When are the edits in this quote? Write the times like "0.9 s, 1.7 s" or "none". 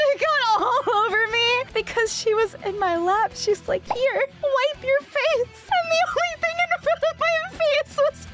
none